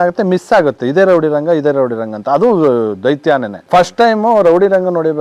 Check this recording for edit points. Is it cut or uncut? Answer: cut